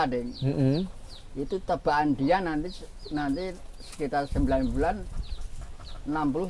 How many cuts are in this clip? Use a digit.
0